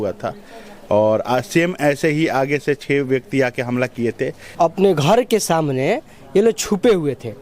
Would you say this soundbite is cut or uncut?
cut